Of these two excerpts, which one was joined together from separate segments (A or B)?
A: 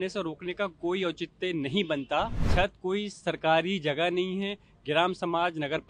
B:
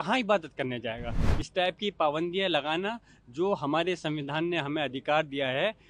A